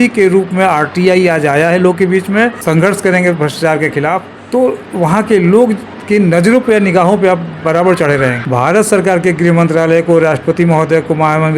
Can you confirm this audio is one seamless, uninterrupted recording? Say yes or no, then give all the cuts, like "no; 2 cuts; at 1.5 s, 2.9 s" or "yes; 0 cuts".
no; 3 cuts; at 2.6 s, 4.3 s, 8.4 s